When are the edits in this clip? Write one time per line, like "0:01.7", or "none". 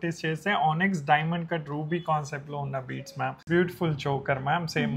0:03.4